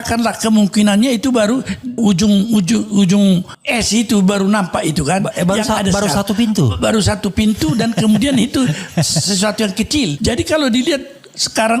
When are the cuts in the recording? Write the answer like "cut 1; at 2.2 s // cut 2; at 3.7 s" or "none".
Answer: cut 1; at 1.9 s // cut 2; at 3.6 s // cut 3; at 10.2 s